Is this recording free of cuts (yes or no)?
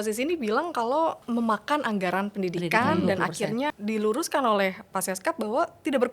no